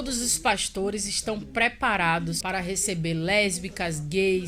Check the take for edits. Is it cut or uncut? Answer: cut